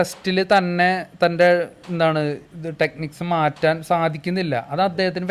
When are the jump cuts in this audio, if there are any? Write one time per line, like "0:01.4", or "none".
none